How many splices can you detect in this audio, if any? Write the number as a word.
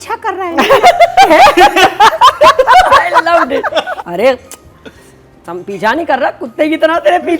one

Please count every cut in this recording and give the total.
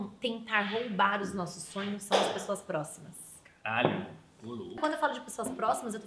one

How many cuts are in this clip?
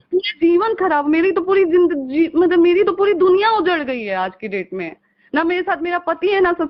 zero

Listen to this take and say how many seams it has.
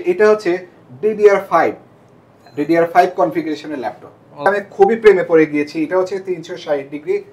one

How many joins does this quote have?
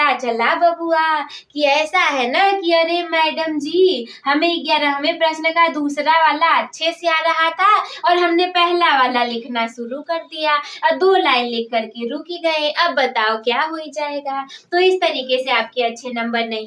zero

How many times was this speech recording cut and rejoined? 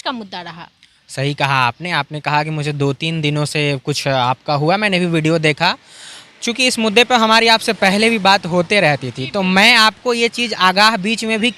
zero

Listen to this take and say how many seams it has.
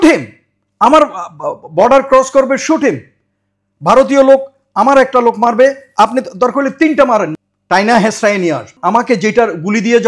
two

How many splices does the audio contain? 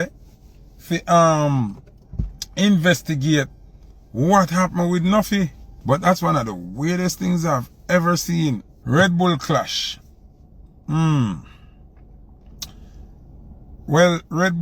two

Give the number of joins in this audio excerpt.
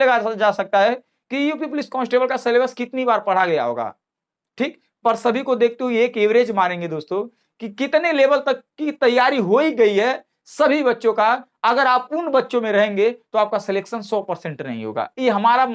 zero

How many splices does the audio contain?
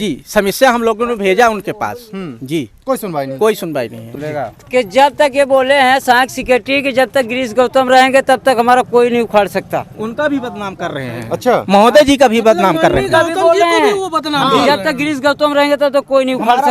one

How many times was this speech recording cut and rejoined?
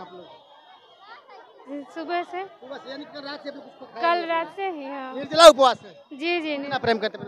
zero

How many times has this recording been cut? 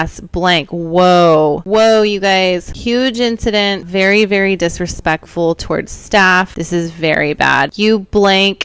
five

